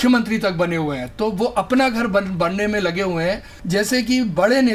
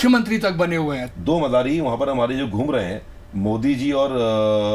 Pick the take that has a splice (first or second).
second